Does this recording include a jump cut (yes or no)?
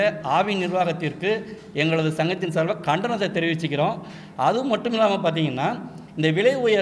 no